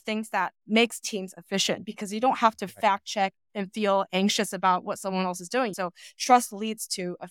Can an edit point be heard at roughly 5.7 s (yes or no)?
yes